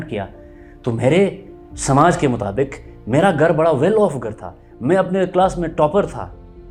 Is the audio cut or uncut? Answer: uncut